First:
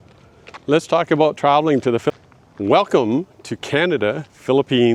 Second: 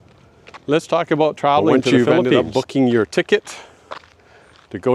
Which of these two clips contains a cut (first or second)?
second